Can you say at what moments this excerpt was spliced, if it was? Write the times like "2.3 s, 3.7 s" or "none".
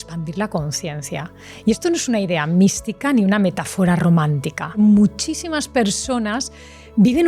4.8 s